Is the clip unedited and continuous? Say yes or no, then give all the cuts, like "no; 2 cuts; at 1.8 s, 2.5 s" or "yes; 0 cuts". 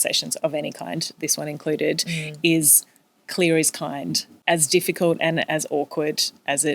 no; 1 cut; at 4.4 s